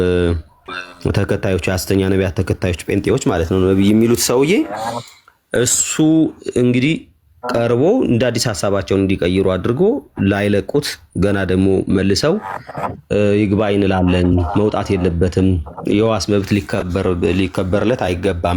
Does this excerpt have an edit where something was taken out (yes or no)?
no